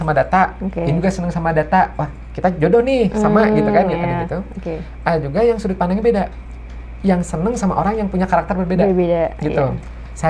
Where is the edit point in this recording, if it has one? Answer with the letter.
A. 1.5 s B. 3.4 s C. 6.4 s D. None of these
D